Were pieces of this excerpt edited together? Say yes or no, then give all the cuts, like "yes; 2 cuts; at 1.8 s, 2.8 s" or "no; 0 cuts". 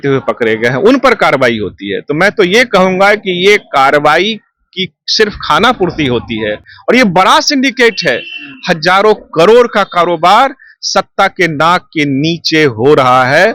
no; 0 cuts